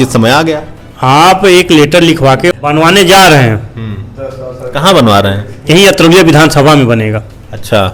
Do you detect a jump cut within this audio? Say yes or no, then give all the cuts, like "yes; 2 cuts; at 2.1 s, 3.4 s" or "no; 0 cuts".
yes; 1 cut; at 2.5 s